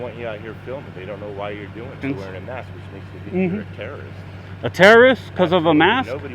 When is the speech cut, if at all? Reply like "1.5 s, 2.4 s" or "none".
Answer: 2.0 s